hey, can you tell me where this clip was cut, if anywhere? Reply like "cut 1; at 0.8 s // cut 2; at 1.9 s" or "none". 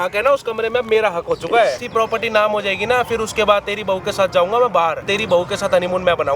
cut 1; at 1.8 s // cut 2; at 5.0 s